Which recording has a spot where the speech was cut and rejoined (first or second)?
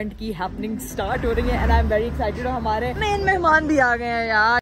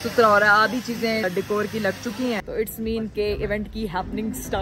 second